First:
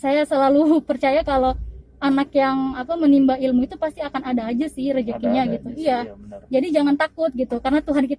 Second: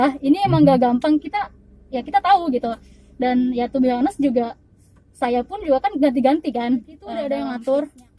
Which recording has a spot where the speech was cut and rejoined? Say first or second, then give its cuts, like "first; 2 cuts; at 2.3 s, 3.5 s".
second; 1 cut; at 7.1 s